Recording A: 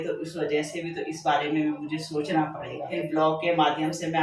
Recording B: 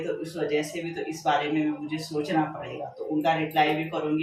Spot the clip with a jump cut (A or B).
A